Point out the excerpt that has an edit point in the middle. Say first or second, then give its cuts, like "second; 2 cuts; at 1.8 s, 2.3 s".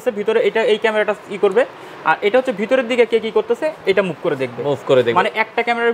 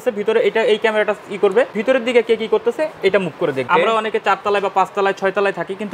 second; 2 cuts; at 1.8 s, 3.7 s